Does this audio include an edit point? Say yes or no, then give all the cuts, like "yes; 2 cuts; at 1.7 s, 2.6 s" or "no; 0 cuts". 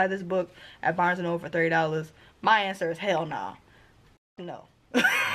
no; 0 cuts